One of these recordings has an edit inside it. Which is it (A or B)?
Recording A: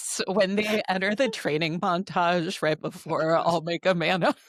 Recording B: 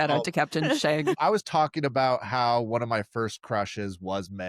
B